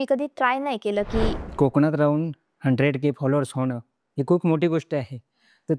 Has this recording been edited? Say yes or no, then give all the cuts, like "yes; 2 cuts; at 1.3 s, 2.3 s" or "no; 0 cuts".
yes; 1 cut; at 1.5 s